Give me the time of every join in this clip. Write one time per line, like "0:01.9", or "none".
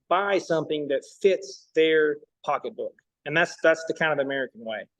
0:02.3